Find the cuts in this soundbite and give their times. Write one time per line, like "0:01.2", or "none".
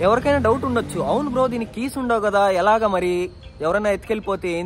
none